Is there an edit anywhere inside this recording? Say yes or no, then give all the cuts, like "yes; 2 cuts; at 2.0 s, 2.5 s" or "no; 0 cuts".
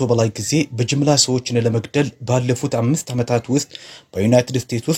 no; 0 cuts